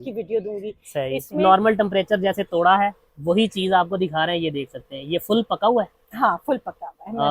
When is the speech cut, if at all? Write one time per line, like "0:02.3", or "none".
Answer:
0:01.3